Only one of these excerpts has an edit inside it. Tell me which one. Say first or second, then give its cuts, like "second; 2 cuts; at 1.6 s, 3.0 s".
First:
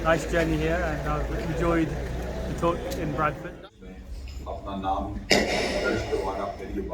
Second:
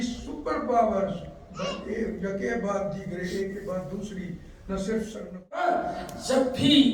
second; 1 cut; at 5.6 s